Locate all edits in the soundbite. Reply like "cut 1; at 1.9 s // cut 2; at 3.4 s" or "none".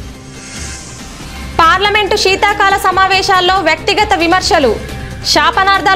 cut 1; at 1.1 s